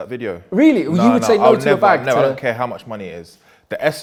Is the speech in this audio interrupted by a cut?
no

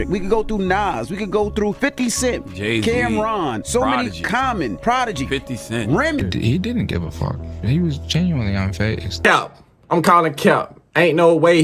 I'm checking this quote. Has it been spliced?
yes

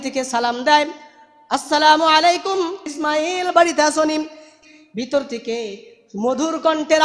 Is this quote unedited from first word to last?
no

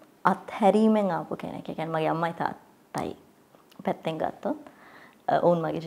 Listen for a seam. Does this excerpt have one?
no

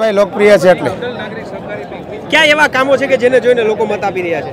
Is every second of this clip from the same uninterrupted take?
yes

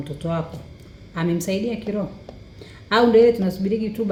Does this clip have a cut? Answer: no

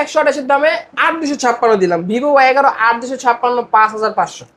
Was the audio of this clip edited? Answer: no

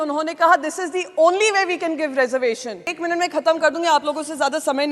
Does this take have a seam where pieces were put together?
yes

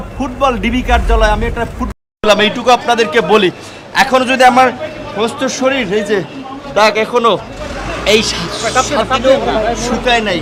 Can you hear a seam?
no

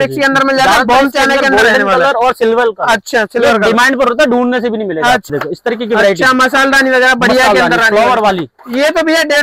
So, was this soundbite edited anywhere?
yes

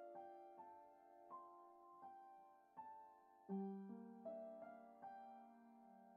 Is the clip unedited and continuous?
yes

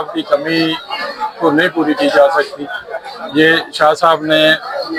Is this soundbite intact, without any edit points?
yes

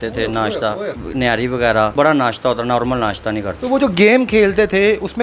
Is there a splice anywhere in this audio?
yes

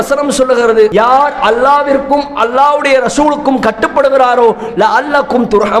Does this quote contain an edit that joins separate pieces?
no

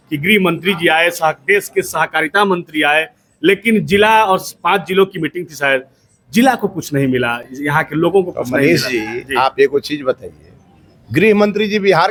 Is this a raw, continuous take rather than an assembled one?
yes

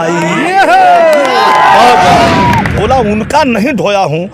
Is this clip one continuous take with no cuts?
no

